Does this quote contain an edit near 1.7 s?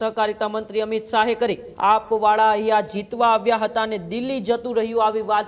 yes; 1 cut; at 1.7 s

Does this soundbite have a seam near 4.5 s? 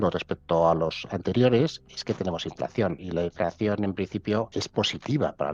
yes; 2 cuts; at 3.0 s, 4.5 s

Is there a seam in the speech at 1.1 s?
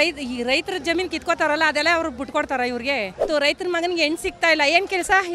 no; 1 cut; at 3.2 s

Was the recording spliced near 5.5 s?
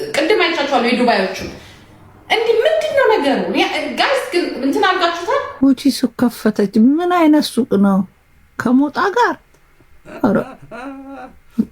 yes; 1 cut; at 5.5 s

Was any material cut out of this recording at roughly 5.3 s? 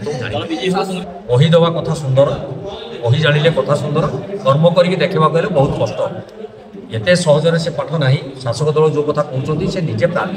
no; 1 cut; at 1.1 s

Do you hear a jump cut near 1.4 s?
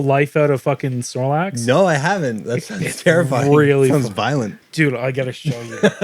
no; 1 cut; at 4.6 s

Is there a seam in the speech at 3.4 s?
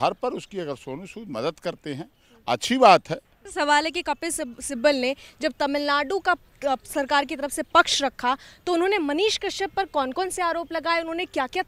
yes; 1 cut; at 3.4 s

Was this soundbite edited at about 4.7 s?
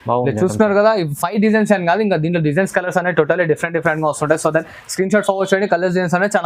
no; 0 cuts

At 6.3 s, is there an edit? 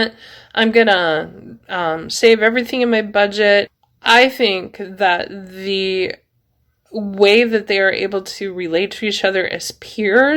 no; 1 cut; at 3.7 s

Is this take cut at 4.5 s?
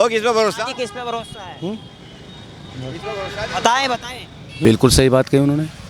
yes; 1 cut; at 4.5 s

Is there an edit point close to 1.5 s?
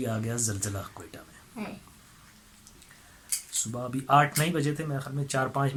no; 0 cuts

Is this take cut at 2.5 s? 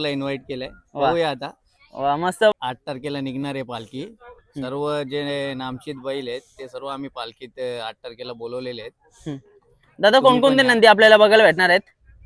yes; 1 cut; at 2.5 s

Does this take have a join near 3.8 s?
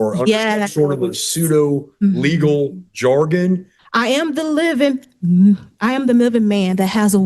yes; 1 cut; at 3.8 s

